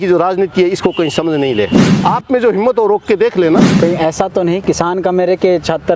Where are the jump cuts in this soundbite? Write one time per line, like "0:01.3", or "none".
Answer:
0:01.9
0:03.7